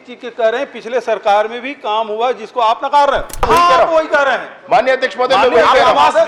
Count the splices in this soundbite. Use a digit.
1